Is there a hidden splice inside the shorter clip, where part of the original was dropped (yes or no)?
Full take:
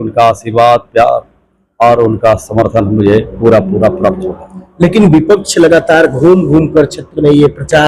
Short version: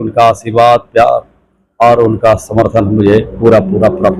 no